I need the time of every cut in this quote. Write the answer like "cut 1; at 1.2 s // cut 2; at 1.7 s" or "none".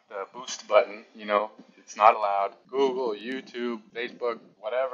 none

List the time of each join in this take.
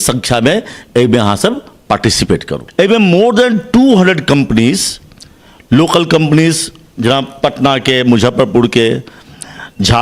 cut 1; at 2.6 s

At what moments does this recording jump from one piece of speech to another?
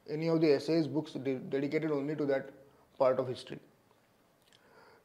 none

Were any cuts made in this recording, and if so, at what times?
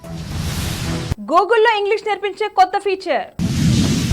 cut 1; at 1.1 s

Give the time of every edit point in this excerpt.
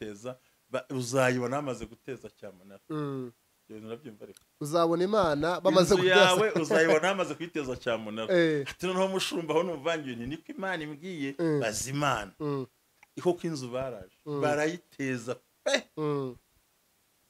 none

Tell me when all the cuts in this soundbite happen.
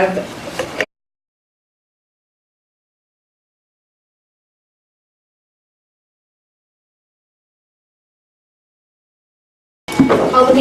none

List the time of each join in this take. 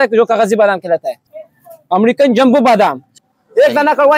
cut 1; at 1.2 s // cut 2; at 3.2 s

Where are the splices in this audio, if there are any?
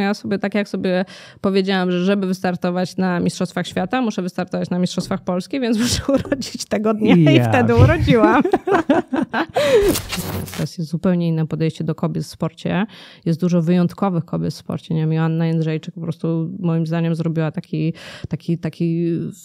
cut 1; at 10.2 s

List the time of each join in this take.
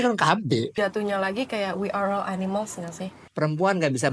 cut 1; at 0.7 s // cut 2; at 3.2 s

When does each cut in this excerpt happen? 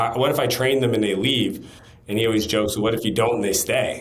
none

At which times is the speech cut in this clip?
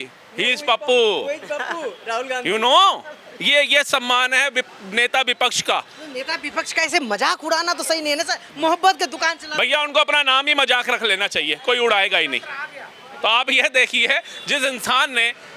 none

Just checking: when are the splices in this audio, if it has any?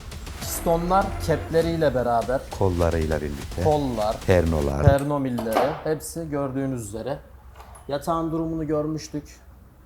cut 1; at 4.2 s

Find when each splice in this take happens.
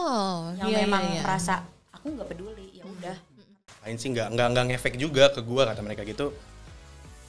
cut 1; at 3.3 s

